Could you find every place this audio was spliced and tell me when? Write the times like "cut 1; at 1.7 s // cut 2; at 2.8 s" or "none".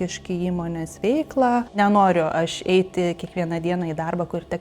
cut 1; at 1.8 s